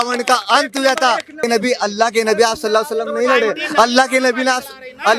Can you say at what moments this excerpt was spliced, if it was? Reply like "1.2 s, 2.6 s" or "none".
1.4 s